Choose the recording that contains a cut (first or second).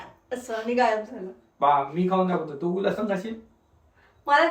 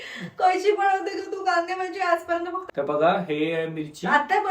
second